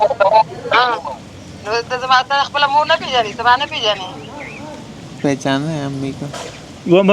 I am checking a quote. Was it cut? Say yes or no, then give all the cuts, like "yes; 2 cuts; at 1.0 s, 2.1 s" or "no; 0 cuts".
yes; 1 cut; at 1.0 s